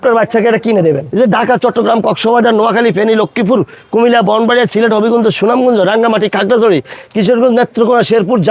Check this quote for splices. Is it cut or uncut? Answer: cut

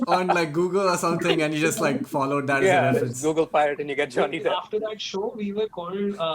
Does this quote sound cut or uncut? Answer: cut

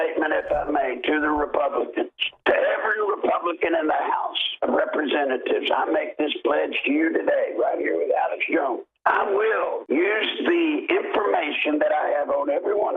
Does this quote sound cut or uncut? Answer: cut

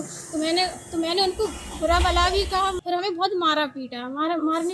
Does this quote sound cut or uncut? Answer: cut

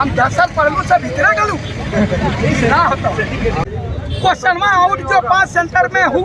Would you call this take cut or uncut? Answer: cut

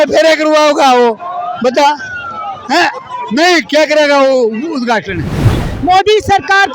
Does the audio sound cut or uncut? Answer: cut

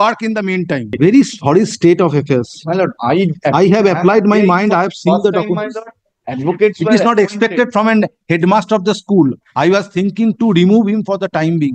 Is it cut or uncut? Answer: cut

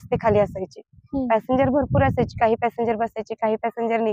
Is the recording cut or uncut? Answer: uncut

